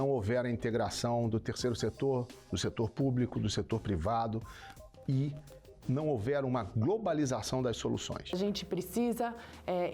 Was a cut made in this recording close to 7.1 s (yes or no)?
no